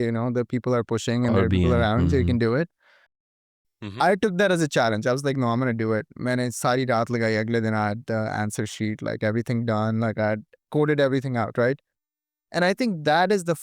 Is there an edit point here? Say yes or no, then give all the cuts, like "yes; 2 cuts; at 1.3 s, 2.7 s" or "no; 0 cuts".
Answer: yes; 1 cut; at 3.3 s